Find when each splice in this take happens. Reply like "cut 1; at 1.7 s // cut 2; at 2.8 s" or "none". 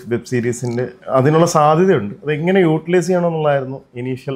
none